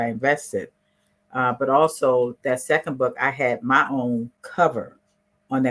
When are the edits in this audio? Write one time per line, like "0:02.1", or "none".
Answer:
0:04.4